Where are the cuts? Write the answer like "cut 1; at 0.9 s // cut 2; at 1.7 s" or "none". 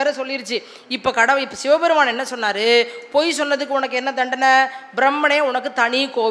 none